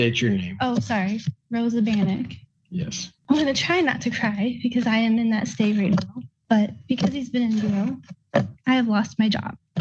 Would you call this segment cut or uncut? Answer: uncut